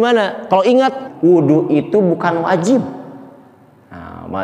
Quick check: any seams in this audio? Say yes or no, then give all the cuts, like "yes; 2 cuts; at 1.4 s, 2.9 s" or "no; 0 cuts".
yes; 1 cut; at 1.0 s